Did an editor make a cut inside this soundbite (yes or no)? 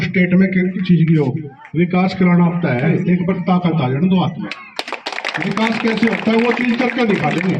yes